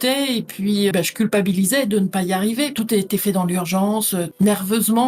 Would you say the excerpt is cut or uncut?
cut